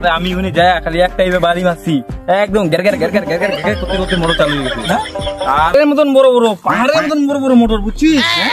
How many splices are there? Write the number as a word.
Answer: one